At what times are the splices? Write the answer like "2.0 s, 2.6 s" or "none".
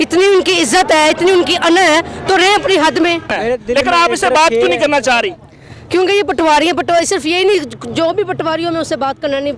3.3 s